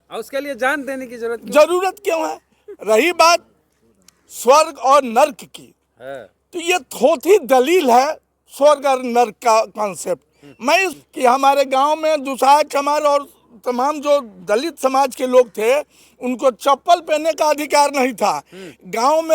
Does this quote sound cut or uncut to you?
cut